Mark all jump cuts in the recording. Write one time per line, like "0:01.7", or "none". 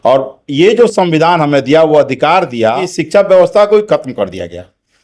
0:02.9